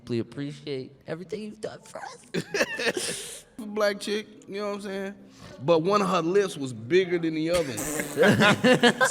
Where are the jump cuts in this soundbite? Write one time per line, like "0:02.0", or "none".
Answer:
0:03.6